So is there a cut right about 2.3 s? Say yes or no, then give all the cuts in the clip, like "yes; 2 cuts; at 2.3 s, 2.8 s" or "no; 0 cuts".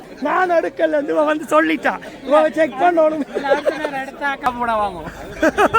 no; 1 cut; at 4.5 s